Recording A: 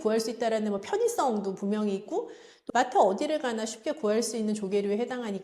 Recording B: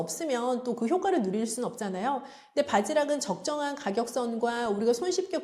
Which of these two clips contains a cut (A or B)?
A